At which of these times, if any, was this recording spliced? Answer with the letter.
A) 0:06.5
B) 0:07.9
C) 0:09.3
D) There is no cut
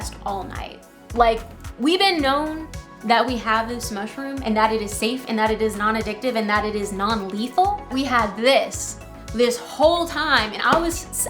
B